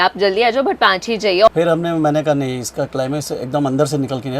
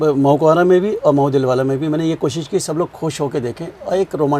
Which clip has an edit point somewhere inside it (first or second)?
first